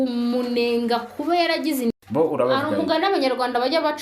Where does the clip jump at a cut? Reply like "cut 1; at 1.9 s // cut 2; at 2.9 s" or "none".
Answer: cut 1; at 1.9 s